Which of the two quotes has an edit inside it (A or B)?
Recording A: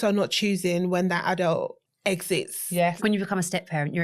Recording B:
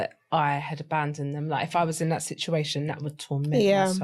A